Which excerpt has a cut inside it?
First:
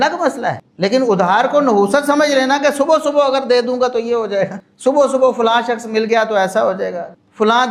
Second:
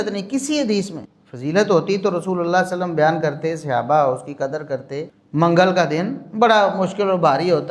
second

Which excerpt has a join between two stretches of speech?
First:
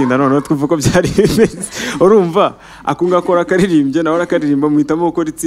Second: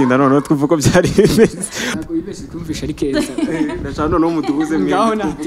second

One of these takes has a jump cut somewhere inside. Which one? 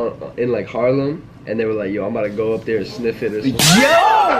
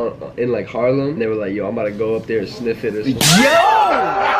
second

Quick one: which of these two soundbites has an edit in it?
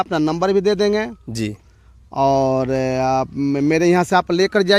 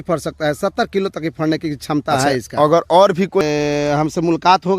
second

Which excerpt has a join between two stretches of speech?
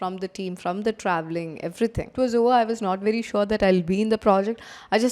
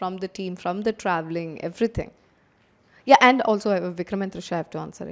first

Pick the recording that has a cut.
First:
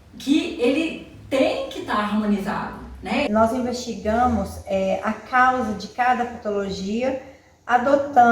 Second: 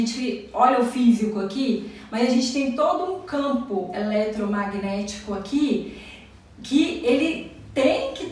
first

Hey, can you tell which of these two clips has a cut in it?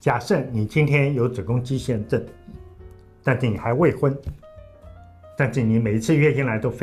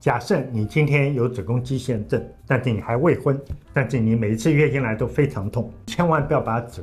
second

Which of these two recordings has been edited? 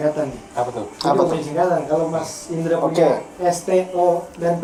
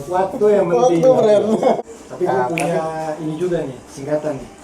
second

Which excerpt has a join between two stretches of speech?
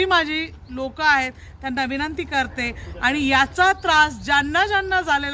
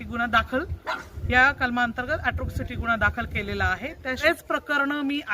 second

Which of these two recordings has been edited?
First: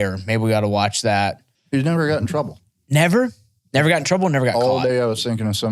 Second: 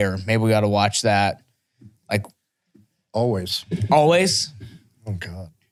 first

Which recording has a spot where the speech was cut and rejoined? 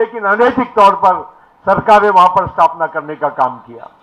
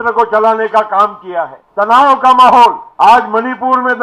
second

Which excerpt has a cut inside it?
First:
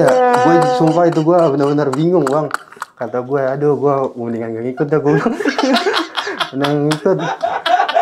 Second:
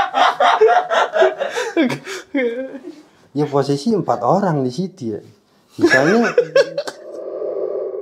second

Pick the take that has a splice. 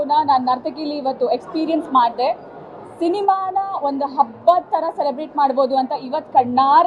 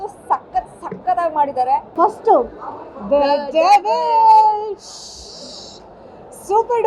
second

